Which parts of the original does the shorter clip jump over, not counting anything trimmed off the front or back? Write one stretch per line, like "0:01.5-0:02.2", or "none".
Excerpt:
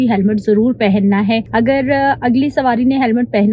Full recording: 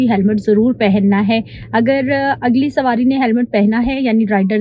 0:01.5-0:01.7